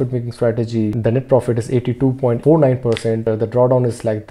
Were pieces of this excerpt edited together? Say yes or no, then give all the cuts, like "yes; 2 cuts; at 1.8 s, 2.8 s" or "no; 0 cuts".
yes; 3 cuts; at 0.9 s, 2.4 s, 3.2 s